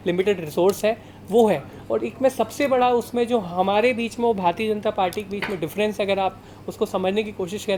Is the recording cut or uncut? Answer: uncut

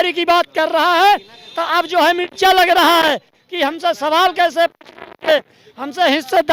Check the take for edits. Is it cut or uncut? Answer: uncut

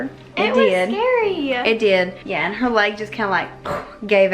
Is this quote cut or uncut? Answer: cut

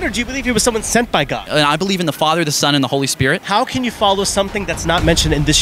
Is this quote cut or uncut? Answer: cut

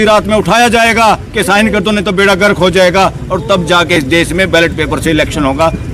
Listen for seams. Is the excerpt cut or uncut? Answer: uncut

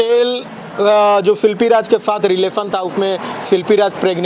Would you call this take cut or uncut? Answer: uncut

